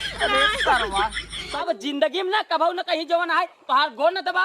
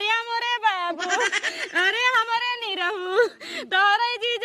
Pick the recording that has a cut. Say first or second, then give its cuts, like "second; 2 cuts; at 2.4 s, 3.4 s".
first; 1 cut; at 1.5 s